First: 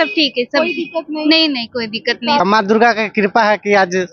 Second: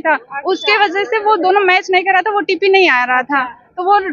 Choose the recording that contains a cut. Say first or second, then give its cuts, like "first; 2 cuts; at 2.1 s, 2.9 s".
first; 1 cut; at 2.4 s